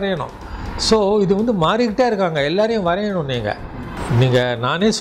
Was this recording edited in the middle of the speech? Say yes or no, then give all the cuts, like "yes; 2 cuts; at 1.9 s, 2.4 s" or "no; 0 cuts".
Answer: yes; 1 cut; at 3.9 s